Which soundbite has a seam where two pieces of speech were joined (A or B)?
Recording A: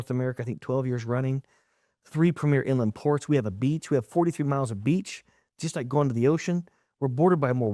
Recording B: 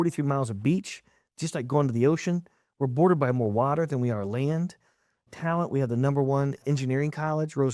B